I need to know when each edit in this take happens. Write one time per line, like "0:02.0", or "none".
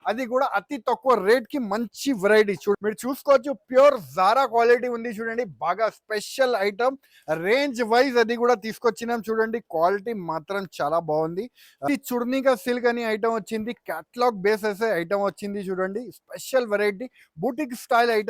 0:02.7
0:11.8